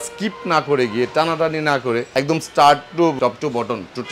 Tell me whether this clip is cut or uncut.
cut